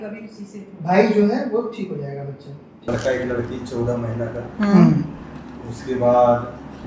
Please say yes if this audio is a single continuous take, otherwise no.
no